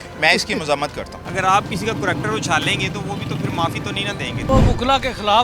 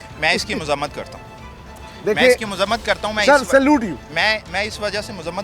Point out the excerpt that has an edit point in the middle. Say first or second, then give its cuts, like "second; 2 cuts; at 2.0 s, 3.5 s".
first; 2 cuts; at 1.2 s, 4.5 s